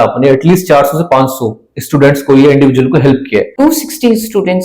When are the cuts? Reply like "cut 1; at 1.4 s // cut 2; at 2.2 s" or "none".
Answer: cut 1; at 3.5 s